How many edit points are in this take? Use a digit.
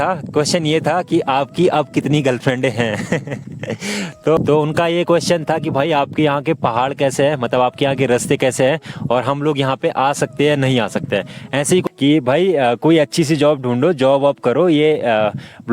2